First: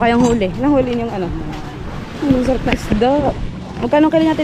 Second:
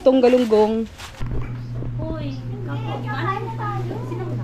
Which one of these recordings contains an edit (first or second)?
second